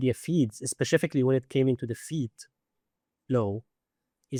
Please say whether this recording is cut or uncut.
uncut